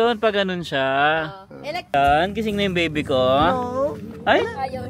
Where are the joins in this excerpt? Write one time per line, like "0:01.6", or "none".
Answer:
0:01.9